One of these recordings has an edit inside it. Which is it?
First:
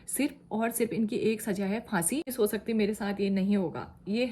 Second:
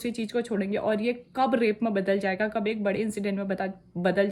first; 1 cut; at 2.3 s

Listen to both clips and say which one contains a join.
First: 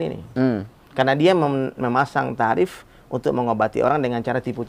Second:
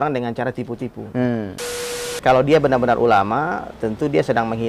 second; 1 cut; at 1.7 s

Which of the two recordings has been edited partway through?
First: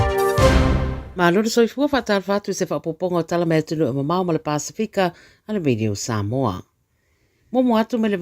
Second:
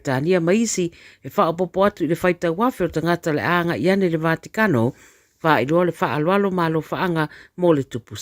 first; 1 cut; at 1.0 s

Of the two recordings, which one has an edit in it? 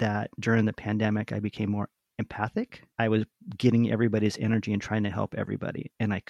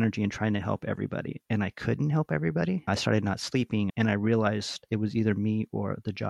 second; 3 cuts; at 2.8 s, 3.9 s, 4.8 s

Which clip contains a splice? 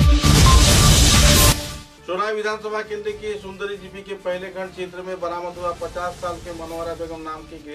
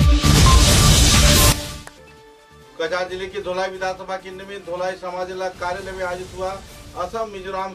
second; 1 cut; at 1.5 s

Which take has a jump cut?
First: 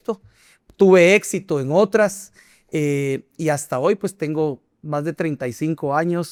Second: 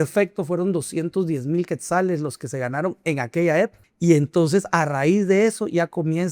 second; 1 cut; at 3.8 s

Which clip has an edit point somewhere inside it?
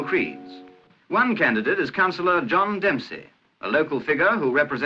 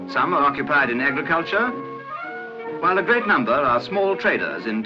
second; 1 cut; at 2.7 s

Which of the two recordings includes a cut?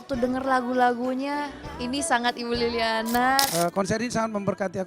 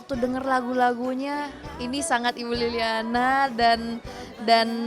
first; 1 cut; at 3.5 s

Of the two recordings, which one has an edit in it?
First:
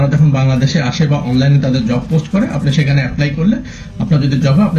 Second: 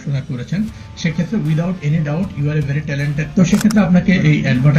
second; 1 cut; at 3.2 s

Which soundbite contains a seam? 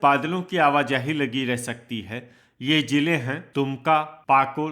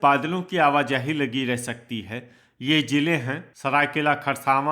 second; 1 cut; at 3.4 s

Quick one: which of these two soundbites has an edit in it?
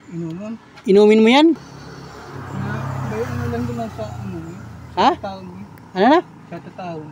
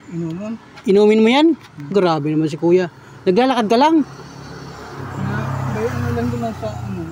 first; 1 cut; at 1.7 s

